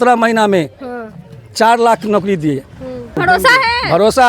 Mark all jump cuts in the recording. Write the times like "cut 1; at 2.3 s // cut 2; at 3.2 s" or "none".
cut 1; at 3.2 s

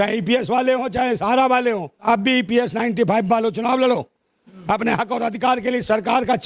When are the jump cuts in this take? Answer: cut 1; at 2.0 s

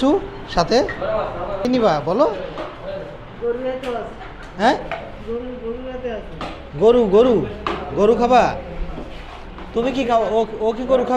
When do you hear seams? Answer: cut 1; at 1.6 s

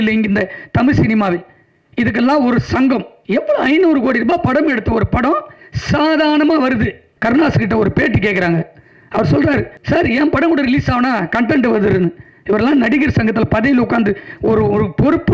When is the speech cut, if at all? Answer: cut 1; at 3.1 s // cut 2; at 7.1 s // cut 3; at 9.7 s

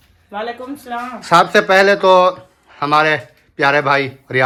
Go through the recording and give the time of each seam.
none

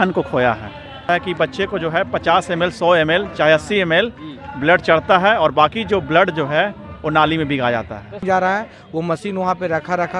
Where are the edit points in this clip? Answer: cut 1; at 1.0 s // cut 2; at 8.2 s

